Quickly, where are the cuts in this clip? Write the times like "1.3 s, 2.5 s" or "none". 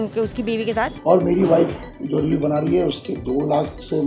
1.0 s